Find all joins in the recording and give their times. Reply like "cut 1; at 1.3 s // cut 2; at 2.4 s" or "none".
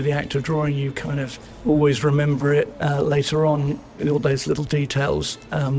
cut 1; at 1.4 s // cut 2; at 2.8 s